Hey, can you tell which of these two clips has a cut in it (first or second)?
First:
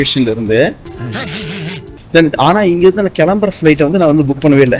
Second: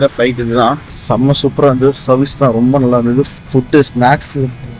second